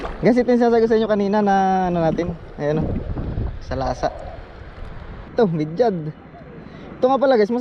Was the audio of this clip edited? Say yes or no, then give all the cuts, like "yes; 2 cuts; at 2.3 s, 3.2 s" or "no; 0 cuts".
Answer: yes; 1 cut; at 5.3 s